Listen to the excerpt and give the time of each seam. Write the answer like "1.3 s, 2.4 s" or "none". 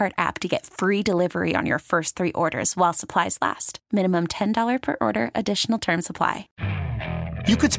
6.5 s

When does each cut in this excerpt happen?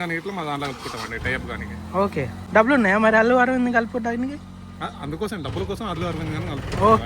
2.4 s

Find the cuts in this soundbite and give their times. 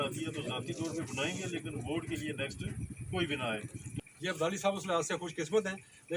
3.9 s

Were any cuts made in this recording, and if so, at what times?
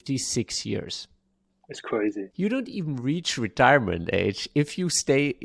2.3 s

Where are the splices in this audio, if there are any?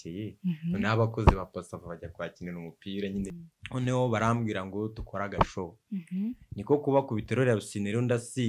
3.4 s

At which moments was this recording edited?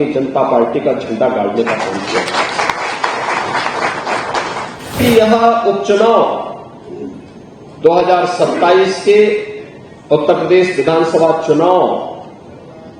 5.0 s

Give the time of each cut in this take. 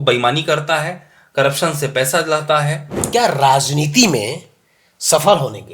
3.0 s

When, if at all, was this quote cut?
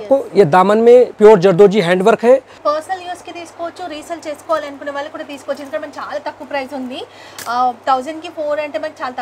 1.1 s, 2.6 s

